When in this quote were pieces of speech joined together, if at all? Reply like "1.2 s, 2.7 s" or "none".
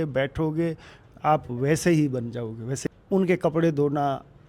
2.7 s